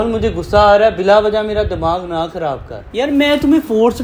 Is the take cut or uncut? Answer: cut